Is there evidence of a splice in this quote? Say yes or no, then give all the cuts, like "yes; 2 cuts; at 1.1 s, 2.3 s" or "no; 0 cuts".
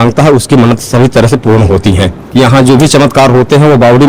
yes; 1 cut; at 2.2 s